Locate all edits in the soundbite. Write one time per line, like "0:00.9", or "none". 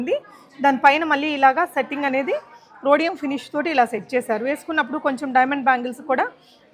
none